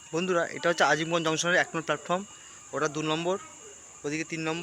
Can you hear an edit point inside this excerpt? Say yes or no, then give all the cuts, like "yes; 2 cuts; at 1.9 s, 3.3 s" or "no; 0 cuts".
no; 0 cuts